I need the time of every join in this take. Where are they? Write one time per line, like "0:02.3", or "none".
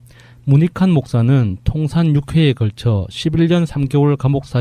0:03.1